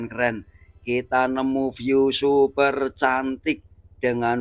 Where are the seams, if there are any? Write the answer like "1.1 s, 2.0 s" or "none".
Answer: none